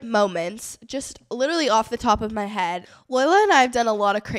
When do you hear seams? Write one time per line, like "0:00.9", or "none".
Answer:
0:02.8